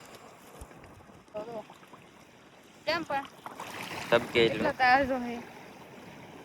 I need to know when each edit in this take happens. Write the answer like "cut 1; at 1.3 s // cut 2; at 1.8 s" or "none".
cut 1; at 1.4 s

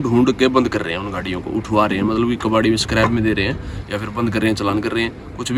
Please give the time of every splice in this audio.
none

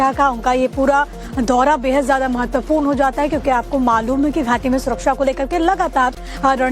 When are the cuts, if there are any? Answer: cut 1; at 1.4 s

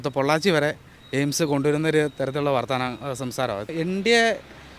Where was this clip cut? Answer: cut 1; at 3.7 s

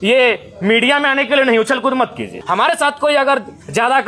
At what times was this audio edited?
cut 1; at 2.4 s

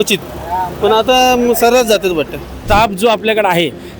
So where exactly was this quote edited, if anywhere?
cut 1; at 2.5 s

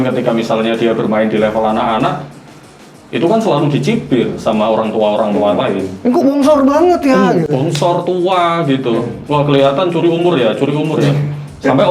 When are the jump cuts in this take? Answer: none

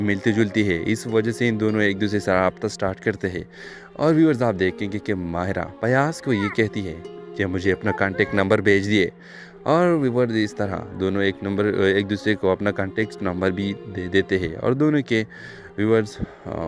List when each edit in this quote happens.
none

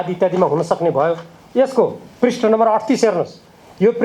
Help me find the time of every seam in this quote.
none

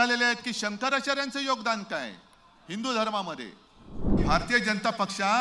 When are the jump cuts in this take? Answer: cut 1; at 4.2 s

